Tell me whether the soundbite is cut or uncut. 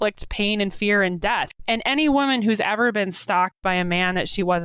cut